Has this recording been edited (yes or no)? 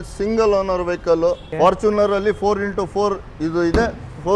yes